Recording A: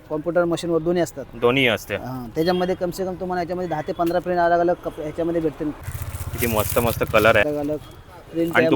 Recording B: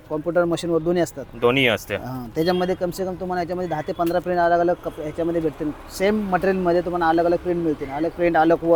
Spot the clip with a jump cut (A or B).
A